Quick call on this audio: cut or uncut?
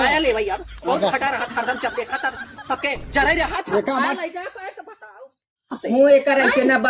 cut